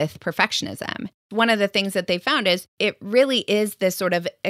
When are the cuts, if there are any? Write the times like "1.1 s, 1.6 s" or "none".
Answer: 1.3 s, 2.7 s